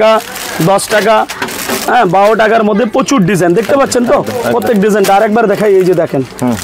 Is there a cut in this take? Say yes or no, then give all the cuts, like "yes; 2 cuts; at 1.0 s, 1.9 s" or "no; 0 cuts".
no; 0 cuts